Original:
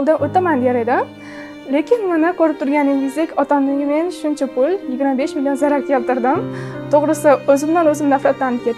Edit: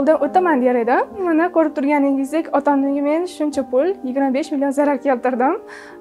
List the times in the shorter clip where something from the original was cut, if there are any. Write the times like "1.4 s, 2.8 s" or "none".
1.2 s

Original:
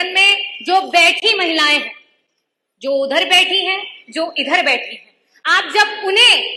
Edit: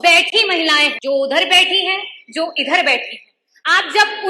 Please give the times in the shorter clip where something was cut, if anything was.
0.9 s

